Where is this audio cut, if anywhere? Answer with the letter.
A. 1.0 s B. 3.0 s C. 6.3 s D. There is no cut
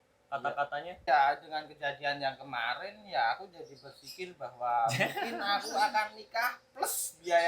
A